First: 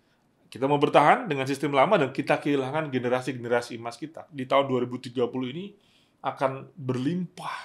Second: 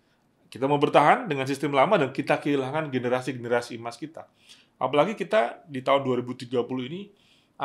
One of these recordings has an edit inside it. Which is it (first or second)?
first